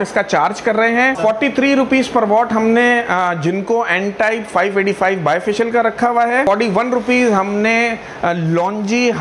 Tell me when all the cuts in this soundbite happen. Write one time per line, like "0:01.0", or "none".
0:01.2
0:06.4